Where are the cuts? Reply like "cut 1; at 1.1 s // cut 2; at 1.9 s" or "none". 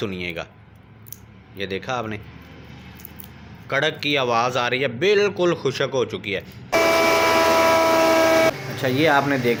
none